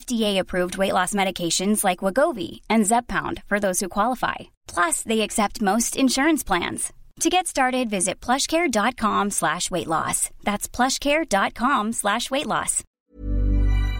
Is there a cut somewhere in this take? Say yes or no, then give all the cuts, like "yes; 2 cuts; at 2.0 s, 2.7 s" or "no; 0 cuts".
yes; 1 cut; at 12.9 s